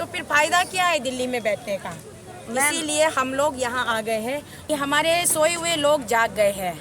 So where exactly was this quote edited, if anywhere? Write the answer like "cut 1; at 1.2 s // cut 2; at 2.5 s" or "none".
cut 1; at 4.6 s